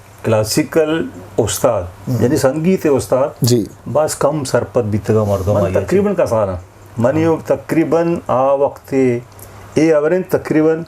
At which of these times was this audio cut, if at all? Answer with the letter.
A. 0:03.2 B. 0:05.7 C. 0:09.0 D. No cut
B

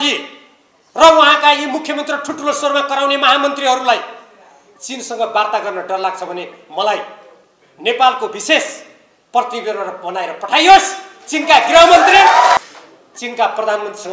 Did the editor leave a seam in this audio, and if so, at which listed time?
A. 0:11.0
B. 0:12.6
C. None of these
B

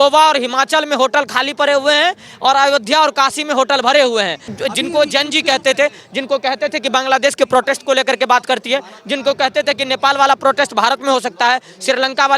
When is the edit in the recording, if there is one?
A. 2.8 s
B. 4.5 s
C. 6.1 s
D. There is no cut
B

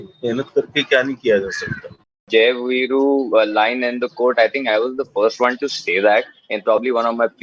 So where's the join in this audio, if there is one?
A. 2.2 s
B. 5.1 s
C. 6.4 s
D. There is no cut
A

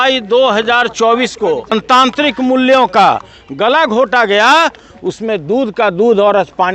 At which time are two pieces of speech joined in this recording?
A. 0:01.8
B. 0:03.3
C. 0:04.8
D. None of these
A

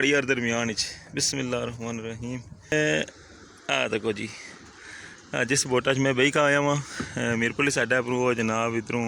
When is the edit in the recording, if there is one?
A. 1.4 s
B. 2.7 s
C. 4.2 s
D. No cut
B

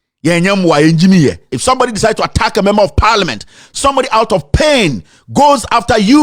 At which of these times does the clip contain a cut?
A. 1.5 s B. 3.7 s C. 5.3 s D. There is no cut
A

